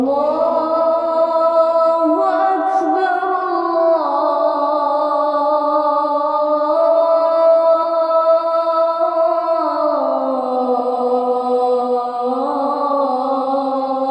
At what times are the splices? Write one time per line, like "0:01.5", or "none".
none